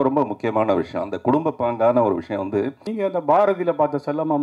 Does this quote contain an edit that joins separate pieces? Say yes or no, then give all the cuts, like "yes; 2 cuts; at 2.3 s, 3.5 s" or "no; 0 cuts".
yes; 1 cut; at 2.8 s